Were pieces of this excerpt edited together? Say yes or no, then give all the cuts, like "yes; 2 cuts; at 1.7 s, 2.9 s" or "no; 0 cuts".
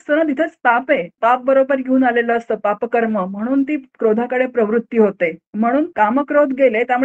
yes; 1 cut; at 5.4 s